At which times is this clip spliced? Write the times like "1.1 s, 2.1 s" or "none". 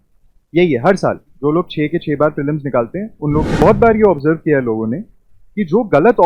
3.5 s